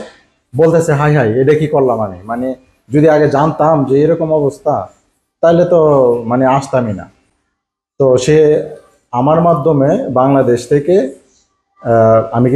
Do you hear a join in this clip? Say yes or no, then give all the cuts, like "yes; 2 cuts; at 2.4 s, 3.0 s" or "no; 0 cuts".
no; 0 cuts